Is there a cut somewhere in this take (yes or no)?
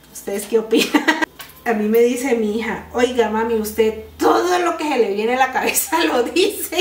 yes